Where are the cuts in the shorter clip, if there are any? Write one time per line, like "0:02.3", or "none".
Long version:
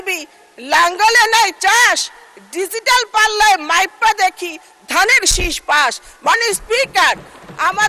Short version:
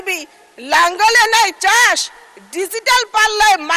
none